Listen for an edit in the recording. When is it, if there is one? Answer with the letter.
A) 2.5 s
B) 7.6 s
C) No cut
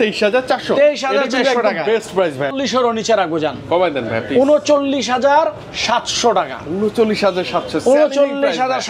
A